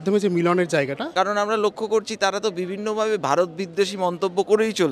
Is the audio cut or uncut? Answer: cut